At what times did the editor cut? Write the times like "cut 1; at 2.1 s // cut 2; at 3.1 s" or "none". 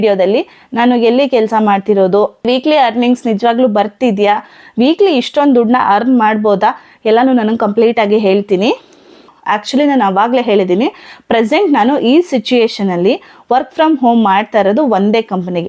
none